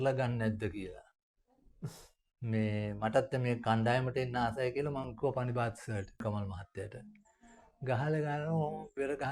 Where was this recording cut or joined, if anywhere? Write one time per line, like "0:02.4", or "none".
0:06.2